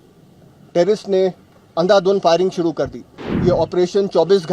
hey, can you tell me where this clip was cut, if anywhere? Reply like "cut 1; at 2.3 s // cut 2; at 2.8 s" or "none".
cut 1; at 3.3 s